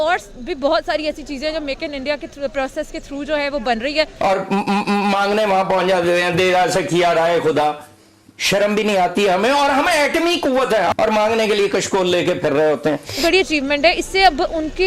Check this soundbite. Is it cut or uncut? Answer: cut